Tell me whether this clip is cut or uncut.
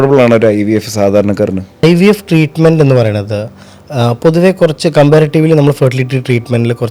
cut